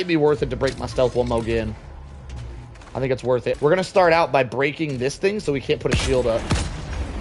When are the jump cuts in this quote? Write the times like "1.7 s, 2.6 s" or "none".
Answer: 3.6 s

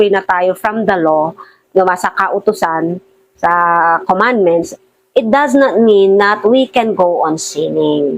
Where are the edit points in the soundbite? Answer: none

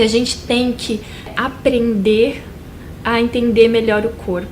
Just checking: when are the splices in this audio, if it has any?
1.3 s

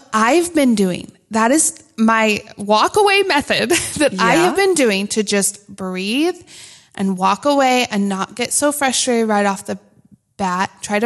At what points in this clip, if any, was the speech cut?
none

